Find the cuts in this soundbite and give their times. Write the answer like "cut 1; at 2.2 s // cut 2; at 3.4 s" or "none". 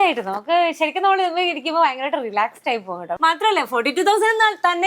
cut 1; at 3.1 s